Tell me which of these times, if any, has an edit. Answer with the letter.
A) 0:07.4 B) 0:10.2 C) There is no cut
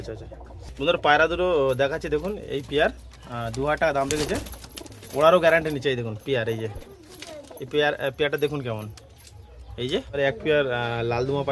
B